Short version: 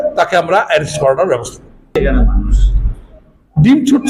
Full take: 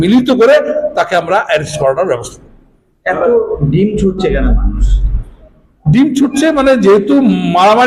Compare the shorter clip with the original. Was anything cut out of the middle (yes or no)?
yes